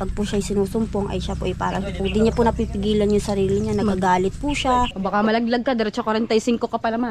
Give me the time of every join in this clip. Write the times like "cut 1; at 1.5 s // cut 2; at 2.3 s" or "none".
cut 1; at 4.9 s